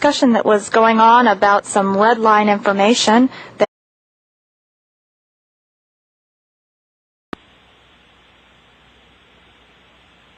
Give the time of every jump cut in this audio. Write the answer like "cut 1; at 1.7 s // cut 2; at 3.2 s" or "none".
none